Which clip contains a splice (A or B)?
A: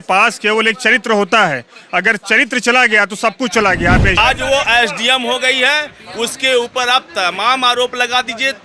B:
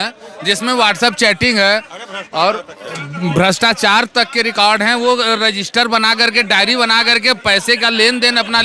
A